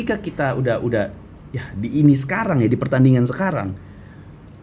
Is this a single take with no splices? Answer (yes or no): yes